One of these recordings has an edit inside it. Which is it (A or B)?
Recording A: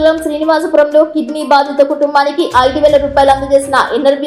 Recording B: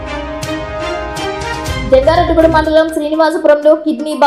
B